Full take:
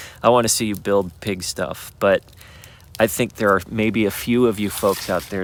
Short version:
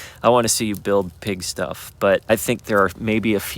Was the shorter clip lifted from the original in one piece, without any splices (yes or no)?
no